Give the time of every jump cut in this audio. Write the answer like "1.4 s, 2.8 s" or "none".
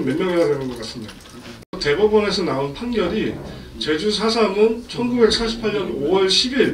1.7 s